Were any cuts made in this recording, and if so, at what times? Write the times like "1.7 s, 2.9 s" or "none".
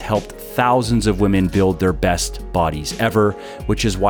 none